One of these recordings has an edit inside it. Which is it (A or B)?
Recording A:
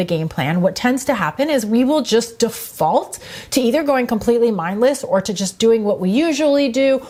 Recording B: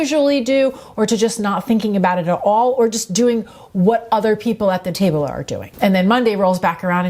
B